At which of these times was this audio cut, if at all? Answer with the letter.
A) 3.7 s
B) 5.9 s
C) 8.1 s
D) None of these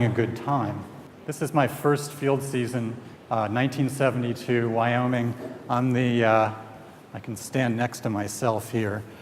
B